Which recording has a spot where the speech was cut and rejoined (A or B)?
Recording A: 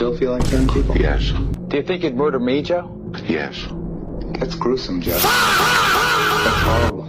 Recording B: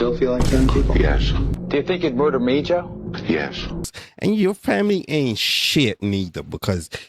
B